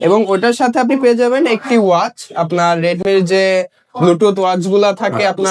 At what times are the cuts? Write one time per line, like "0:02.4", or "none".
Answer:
none